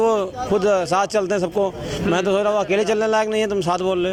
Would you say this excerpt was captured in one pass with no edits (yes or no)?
yes